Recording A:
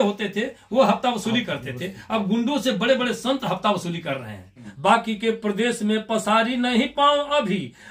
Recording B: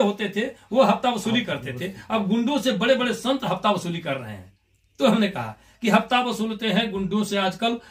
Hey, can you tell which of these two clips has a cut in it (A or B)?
A